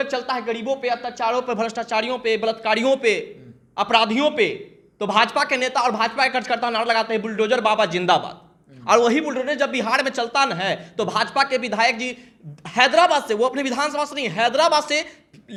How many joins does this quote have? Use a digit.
0